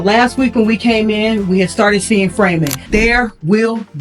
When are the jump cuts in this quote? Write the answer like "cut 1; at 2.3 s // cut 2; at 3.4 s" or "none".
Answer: cut 1; at 2.8 s